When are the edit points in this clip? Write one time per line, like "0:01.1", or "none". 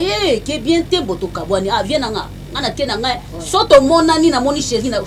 none